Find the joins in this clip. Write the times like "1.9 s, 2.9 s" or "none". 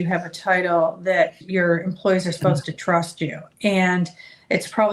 1.4 s